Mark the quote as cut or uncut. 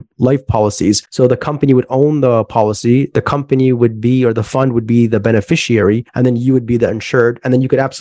cut